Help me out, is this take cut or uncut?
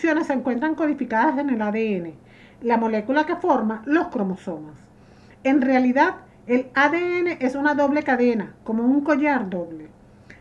cut